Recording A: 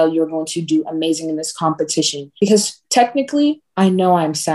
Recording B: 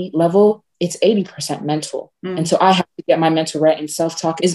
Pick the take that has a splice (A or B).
A